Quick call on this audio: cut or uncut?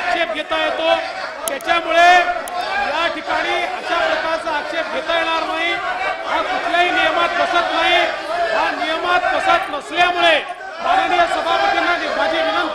uncut